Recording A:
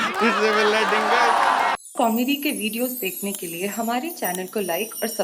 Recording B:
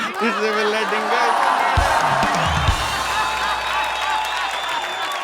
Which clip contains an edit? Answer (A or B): A